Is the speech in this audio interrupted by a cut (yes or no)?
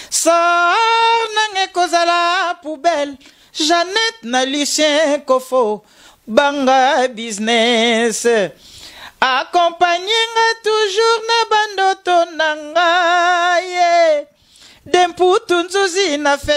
no